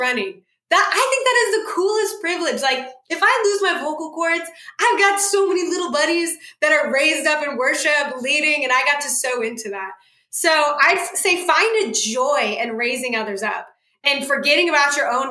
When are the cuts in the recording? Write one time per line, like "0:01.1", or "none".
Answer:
0:14.0